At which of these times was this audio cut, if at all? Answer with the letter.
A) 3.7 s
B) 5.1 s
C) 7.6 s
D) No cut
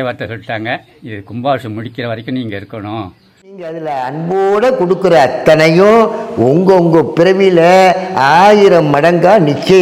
A